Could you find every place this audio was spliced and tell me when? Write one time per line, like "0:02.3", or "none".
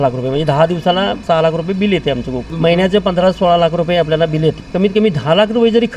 0:01.2
0:02.5
0:04.6